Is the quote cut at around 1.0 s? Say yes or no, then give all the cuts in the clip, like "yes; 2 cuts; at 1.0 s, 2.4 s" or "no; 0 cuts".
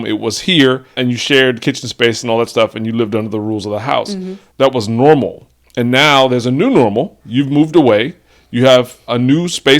yes; 1 cut; at 1.0 s